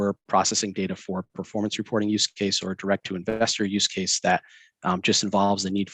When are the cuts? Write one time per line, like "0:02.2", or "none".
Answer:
none